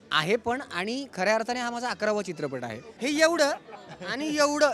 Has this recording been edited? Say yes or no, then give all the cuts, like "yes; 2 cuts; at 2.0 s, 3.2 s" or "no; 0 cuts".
yes; 1 cut; at 2.8 s